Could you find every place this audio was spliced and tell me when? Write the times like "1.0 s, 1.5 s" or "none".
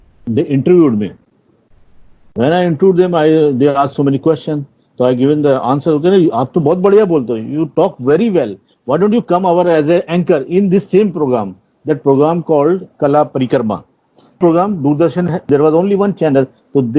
14.4 s, 15.5 s